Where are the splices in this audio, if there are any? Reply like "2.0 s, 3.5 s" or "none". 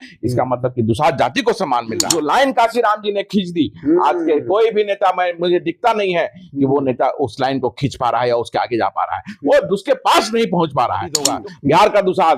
2.1 s, 11.2 s